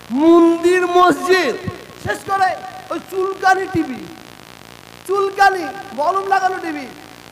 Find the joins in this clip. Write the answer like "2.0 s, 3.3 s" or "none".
2.0 s